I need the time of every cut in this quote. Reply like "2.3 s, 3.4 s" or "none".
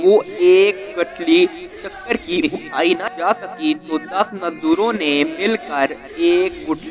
3.1 s